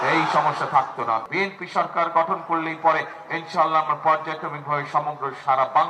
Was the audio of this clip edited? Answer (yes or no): yes